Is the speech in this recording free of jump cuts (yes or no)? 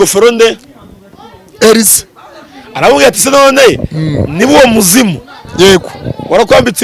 yes